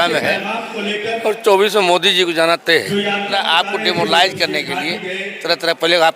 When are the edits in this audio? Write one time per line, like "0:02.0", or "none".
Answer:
0:03.3